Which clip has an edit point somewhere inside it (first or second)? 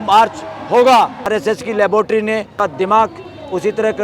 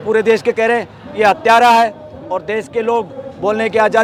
first